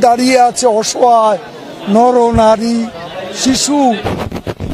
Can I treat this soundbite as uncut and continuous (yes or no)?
yes